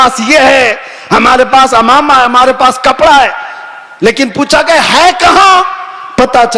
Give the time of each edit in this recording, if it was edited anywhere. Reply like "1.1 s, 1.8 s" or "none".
none